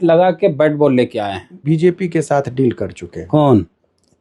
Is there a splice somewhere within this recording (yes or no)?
yes